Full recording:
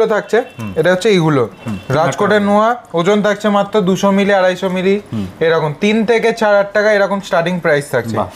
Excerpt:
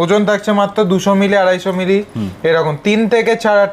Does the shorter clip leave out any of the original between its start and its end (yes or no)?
no